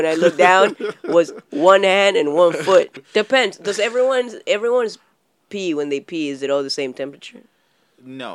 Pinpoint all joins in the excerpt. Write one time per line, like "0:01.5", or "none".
0:02.9

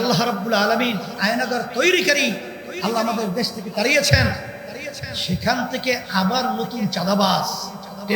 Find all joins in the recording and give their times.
0:01.2

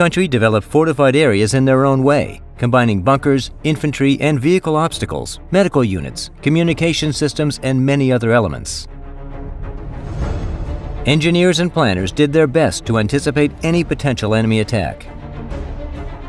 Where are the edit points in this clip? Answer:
0:07.6

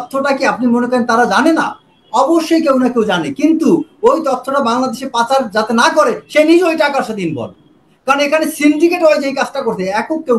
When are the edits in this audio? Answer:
none

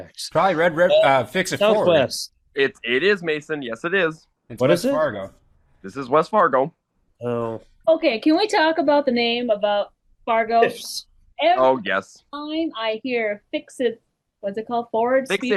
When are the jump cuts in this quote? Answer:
none

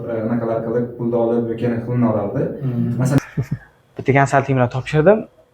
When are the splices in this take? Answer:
0:03.2

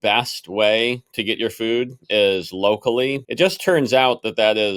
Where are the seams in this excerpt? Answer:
0:03.2

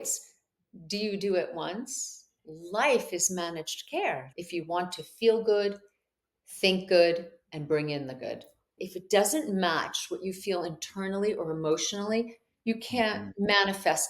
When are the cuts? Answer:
0:02.4
0:04.3
0:08.8

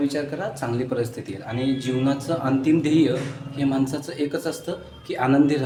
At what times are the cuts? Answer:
none

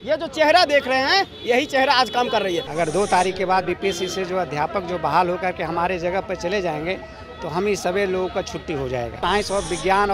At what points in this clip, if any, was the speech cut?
0:02.7
0:09.2

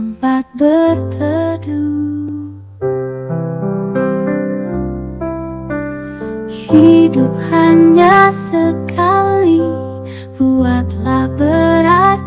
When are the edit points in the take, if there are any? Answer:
none

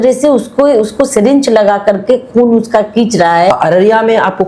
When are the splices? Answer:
0:03.5

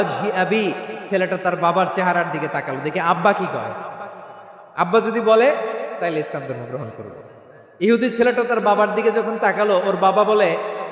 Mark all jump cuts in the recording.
none

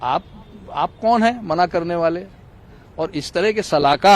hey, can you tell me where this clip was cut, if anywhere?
none

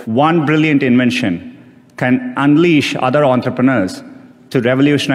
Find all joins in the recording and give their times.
none

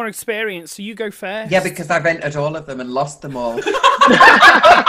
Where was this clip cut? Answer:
none

